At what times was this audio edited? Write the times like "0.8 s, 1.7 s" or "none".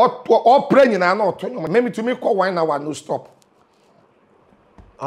1.5 s